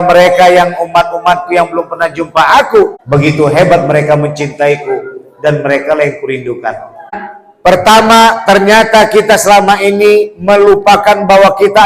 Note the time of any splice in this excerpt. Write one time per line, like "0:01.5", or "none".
0:03.0
0:07.2